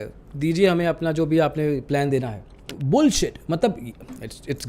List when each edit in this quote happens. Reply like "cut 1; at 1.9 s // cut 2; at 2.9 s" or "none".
cut 1; at 2.7 s